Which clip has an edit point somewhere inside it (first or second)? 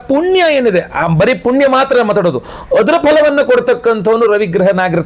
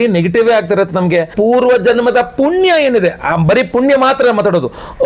second